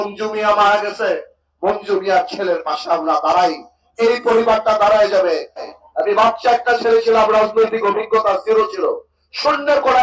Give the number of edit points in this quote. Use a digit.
1